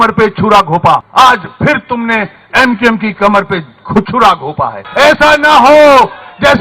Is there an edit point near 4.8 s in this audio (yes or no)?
yes